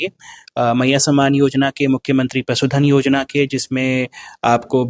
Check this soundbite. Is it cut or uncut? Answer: uncut